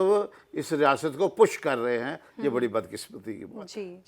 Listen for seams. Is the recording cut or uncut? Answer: uncut